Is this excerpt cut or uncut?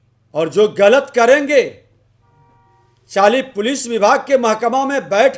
uncut